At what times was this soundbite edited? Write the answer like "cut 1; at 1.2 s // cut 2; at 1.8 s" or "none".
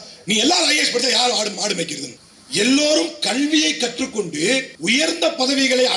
cut 1; at 2.1 s // cut 2; at 4.7 s